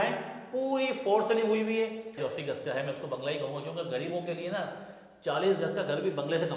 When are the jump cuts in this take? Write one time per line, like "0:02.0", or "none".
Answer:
0:02.2